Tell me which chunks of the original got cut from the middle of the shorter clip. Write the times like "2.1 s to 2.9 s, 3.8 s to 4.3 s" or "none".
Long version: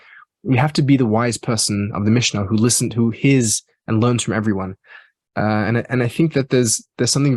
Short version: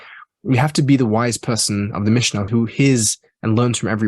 2.5 s to 2.9 s